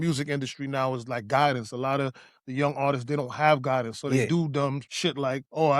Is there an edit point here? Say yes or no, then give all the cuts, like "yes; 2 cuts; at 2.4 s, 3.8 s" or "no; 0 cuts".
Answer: yes; 1 cut; at 4.9 s